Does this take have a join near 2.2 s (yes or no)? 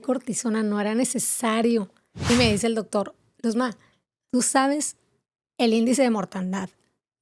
yes